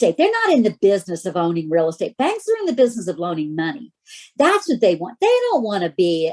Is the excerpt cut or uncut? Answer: uncut